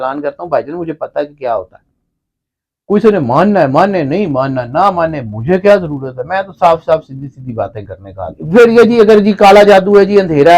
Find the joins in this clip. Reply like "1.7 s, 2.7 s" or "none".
8.4 s